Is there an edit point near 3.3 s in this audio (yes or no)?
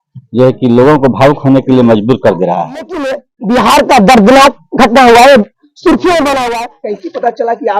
yes